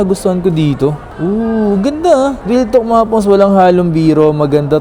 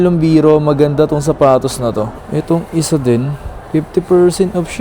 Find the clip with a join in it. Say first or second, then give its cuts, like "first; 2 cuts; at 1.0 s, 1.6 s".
second; 1 cut; at 2.2 s